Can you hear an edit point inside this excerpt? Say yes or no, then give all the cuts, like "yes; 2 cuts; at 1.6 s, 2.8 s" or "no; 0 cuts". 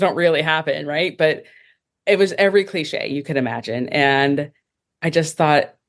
no; 0 cuts